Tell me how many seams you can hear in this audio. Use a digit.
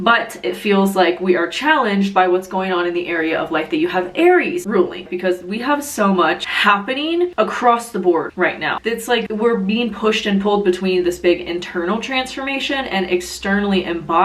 2